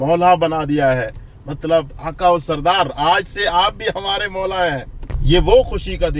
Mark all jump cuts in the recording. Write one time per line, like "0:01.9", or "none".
none